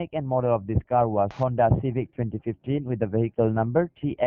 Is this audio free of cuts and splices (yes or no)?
yes